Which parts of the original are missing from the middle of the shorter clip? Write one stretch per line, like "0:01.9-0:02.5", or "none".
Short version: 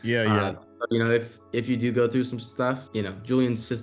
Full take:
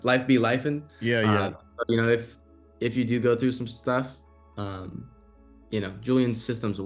0:02.4-0:02.7
0:04.1-0:05.6